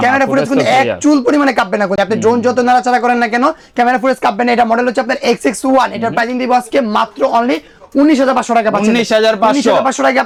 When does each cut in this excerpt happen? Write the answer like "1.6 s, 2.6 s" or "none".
none